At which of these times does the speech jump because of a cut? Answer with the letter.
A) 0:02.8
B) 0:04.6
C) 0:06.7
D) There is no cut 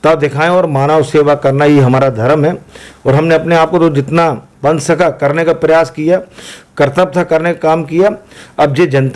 D